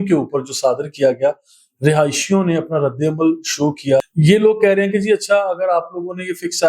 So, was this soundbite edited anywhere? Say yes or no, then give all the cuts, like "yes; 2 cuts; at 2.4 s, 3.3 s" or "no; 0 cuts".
yes; 1 cut; at 4.1 s